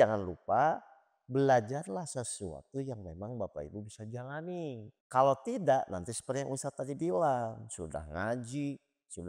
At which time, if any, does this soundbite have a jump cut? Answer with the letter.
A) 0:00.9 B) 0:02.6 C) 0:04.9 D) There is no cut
C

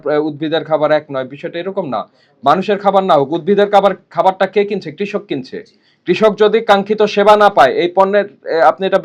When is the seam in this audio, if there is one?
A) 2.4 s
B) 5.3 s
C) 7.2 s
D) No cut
D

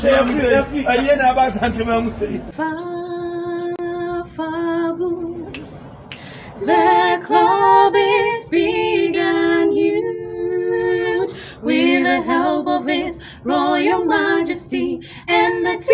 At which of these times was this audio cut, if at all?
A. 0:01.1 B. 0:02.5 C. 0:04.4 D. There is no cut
B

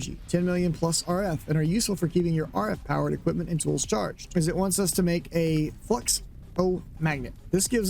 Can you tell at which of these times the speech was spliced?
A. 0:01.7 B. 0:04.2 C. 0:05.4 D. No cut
B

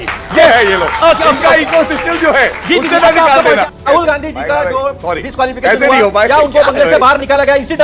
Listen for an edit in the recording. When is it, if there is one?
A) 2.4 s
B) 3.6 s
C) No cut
B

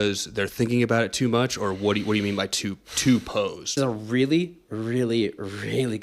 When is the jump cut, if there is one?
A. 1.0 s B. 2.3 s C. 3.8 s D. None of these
C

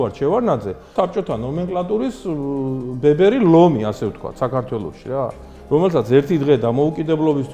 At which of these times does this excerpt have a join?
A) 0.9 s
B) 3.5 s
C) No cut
A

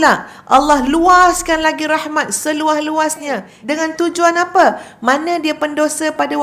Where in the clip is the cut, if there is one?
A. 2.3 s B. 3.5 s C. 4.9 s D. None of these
B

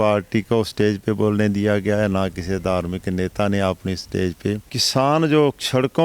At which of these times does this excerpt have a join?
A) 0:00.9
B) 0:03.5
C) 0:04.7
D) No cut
C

